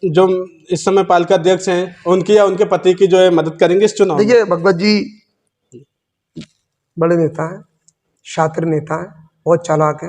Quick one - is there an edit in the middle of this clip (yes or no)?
no